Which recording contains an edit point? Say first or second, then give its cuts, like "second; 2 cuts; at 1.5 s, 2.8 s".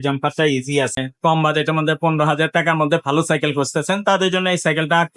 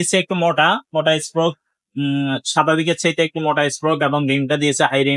first; 1 cut; at 1.0 s